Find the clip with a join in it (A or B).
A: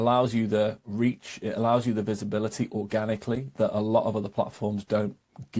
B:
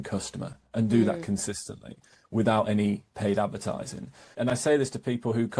B